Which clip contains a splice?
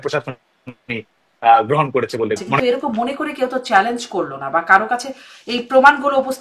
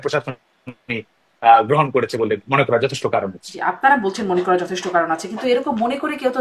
first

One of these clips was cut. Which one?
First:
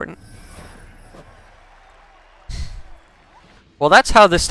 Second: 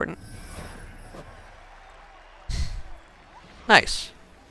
first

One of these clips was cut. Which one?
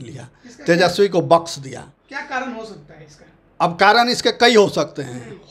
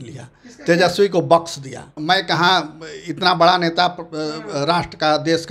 second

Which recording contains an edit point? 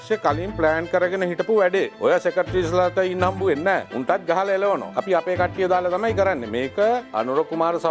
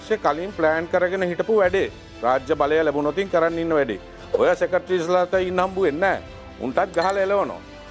first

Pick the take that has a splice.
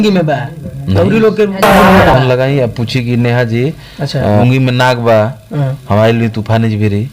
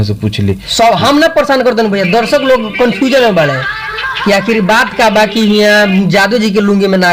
first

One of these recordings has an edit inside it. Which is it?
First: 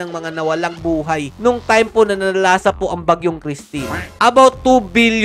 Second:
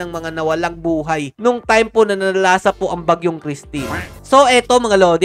first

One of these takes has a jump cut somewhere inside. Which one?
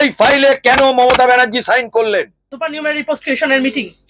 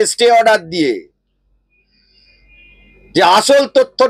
first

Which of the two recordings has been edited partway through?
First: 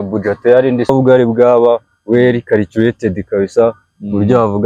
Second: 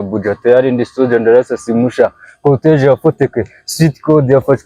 first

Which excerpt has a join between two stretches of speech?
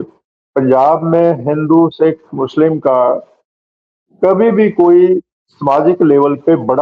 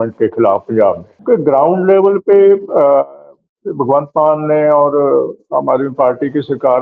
second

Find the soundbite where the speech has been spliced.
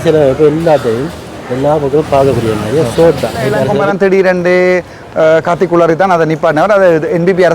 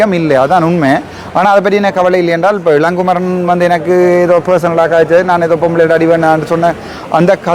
first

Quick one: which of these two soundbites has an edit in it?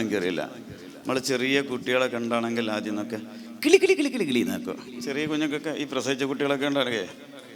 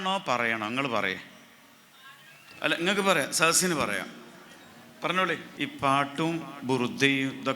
second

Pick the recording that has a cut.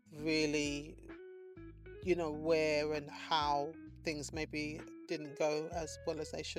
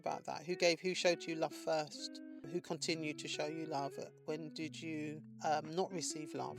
second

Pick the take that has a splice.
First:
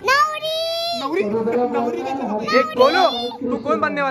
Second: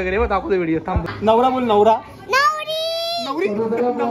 second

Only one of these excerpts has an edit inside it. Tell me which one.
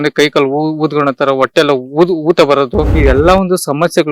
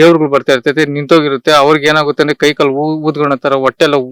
first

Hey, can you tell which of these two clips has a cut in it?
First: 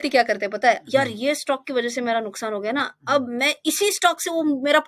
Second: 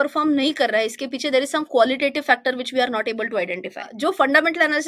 second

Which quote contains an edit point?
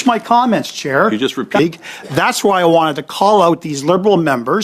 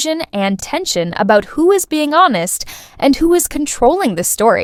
first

